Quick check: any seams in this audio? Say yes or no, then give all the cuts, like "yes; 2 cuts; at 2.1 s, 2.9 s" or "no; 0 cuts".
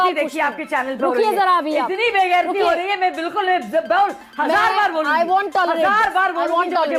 no; 0 cuts